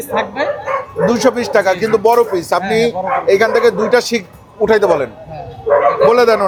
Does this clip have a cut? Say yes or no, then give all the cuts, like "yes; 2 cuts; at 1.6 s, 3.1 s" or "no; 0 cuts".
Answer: no; 0 cuts